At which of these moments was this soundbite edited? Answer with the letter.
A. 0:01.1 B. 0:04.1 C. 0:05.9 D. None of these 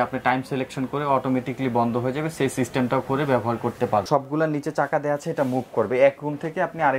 B